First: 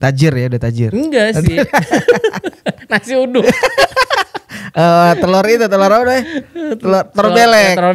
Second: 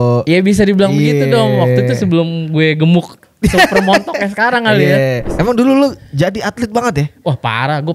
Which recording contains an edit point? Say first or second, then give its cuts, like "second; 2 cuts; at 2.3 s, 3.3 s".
second; 1 cut; at 5.3 s